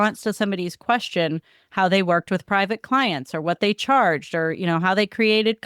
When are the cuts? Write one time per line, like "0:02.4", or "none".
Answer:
none